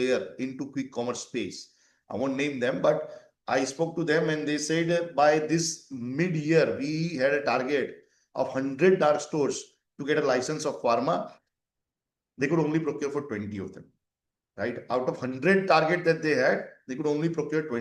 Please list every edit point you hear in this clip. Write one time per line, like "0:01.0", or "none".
none